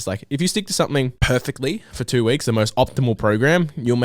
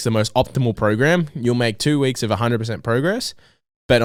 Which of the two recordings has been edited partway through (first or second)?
first